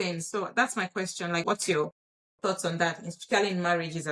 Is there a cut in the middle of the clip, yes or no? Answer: yes